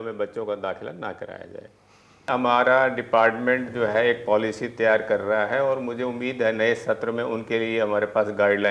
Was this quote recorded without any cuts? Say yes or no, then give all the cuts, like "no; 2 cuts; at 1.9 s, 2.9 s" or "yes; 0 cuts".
no; 1 cut; at 2.3 s